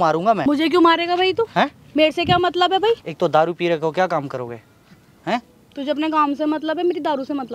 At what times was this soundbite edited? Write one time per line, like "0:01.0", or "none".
0:03.0